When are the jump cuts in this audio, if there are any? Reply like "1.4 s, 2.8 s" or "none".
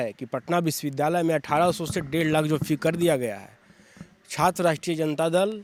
none

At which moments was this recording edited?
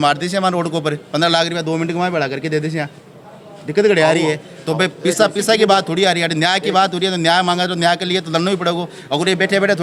none

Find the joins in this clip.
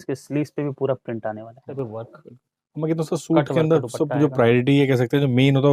1.7 s

